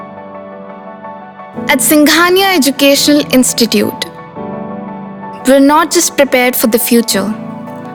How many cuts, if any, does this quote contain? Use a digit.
0